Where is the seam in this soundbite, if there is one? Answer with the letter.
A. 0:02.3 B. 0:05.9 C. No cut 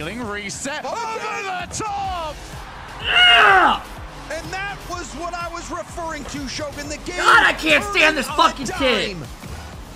C